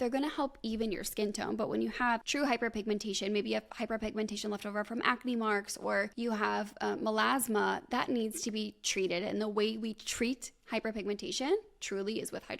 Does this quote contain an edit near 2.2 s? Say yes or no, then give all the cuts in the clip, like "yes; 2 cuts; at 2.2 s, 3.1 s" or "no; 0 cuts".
yes; 2 cuts; at 2.2 s, 6.1 s